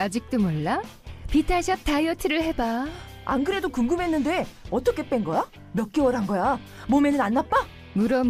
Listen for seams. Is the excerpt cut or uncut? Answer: uncut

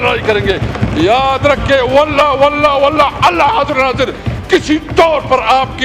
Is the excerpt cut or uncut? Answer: uncut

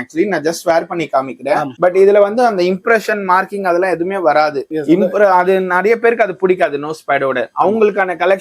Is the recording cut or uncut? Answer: uncut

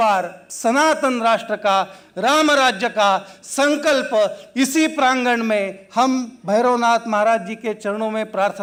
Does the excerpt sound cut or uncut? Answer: uncut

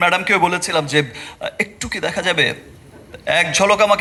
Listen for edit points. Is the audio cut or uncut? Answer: uncut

